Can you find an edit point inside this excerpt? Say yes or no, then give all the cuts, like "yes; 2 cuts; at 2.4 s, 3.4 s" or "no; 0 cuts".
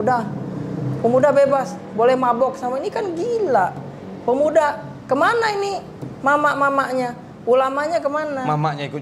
no; 0 cuts